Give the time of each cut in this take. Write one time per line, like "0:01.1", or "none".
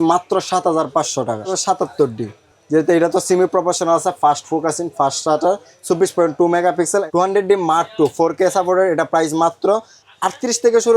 0:01.5
0:07.1